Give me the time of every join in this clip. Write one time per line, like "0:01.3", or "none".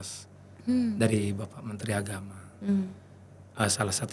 none